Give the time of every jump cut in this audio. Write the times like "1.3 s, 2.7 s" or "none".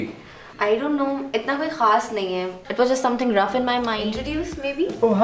4.0 s